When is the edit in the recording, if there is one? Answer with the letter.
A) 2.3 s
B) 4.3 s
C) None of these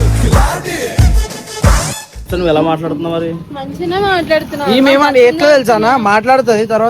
A